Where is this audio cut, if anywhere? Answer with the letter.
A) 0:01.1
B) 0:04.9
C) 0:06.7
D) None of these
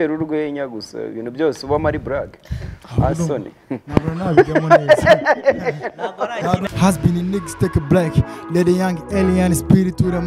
C